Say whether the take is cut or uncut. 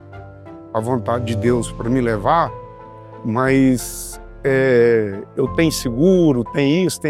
uncut